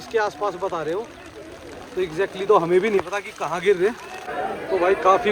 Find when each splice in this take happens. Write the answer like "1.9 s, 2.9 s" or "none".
4.2 s